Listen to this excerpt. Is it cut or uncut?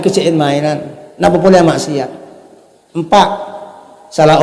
uncut